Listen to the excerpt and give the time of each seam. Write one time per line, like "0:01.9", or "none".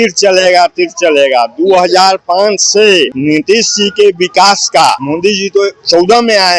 0:03.2
0:05.0